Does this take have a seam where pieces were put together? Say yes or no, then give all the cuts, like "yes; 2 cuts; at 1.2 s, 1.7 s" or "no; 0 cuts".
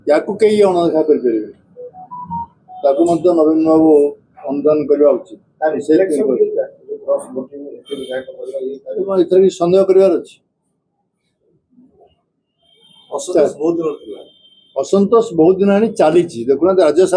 no; 0 cuts